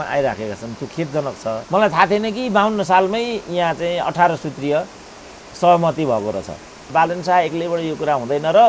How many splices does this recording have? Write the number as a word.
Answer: two